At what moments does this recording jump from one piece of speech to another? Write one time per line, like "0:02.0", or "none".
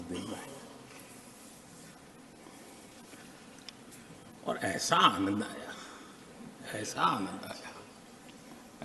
none